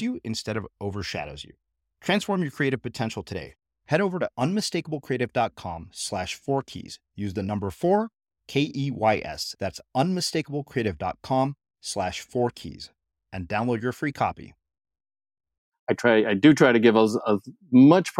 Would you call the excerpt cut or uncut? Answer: cut